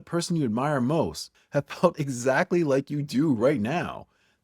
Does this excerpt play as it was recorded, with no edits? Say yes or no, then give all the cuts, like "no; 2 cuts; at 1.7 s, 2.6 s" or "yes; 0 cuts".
no; 1 cut; at 1.3 s